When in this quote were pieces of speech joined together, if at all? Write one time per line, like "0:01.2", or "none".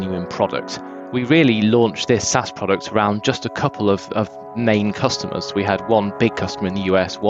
0:00.9